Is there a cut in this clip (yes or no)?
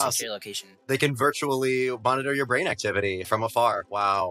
yes